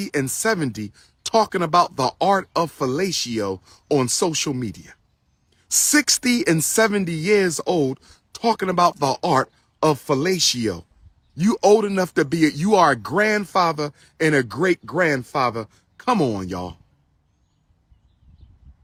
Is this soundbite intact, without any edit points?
yes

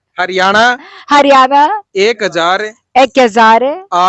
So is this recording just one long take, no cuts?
yes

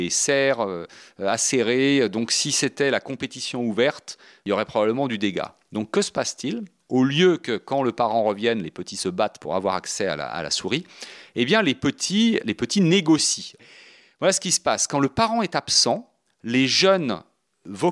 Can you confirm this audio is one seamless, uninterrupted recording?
no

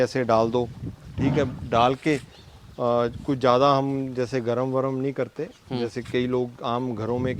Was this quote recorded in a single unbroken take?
yes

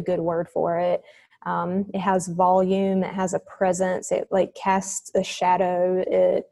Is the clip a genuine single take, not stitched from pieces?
yes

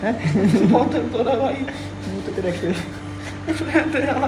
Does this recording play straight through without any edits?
yes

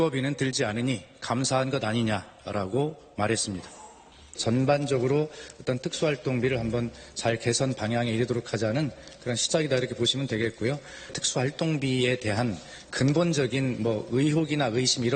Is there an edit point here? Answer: no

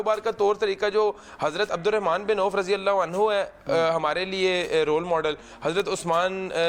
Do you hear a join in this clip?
no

